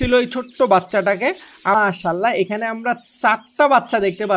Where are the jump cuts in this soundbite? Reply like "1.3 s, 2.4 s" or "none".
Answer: 1.8 s